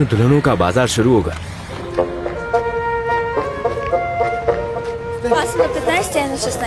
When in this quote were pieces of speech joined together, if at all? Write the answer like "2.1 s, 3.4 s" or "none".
none